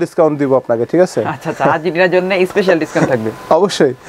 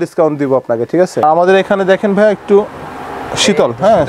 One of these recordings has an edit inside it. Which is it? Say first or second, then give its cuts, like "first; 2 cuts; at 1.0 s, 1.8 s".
second; 1 cut; at 1.2 s